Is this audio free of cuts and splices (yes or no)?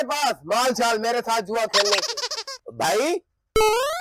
yes